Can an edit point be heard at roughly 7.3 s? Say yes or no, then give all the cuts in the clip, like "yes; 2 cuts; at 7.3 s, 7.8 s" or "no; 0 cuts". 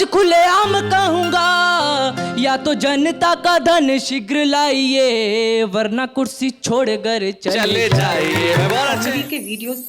no; 1 cut; at 9.0 s